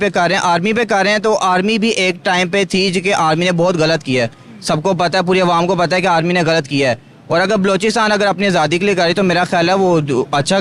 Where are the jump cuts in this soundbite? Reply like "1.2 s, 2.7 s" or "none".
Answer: none